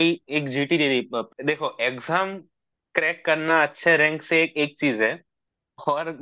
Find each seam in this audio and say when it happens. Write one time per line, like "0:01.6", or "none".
0:01.3